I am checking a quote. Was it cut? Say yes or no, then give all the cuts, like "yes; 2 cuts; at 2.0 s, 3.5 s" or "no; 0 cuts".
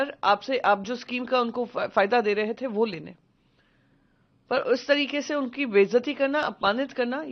no; 0 cuts